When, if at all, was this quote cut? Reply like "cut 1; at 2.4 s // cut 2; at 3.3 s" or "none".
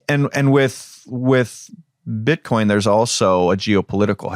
none